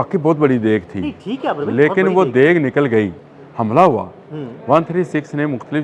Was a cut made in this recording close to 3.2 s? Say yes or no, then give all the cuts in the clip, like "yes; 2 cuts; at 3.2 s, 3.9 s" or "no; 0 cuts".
yes; 1 cut; at 3.2 s